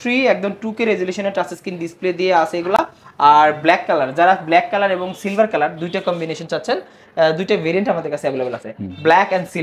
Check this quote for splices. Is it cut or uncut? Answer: uncut